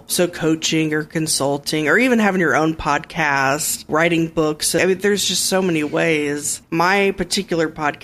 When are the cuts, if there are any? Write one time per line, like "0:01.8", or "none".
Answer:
0:03.9
0:04.8
0:06.6